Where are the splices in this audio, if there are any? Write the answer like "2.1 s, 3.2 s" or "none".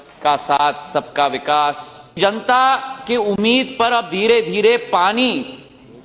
2.2 s